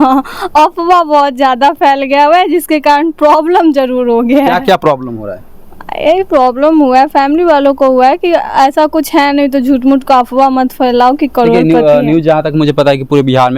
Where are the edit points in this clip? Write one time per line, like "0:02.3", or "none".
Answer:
none